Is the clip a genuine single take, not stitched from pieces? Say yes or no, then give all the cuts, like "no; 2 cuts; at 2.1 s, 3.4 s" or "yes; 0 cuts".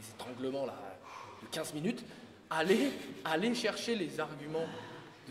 yes; 0 cuts